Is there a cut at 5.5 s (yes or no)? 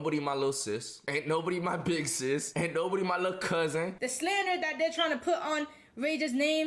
no